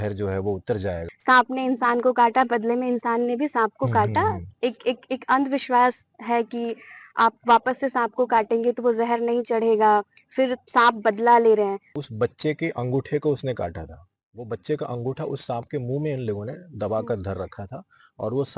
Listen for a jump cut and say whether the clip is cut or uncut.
cut